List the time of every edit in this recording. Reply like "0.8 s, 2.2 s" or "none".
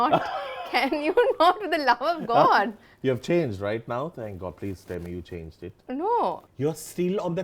6.5 s